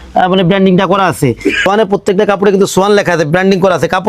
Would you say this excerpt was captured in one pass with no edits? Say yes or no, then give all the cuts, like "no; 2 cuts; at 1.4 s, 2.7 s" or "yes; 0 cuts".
no; 1 cut; at 1.6 s